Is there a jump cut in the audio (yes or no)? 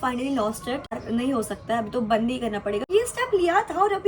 yes